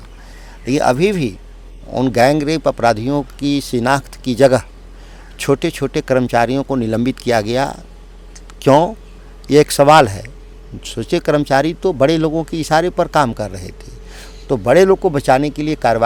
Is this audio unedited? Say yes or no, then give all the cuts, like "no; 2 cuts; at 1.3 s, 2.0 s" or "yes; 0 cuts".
yes; 0 cuts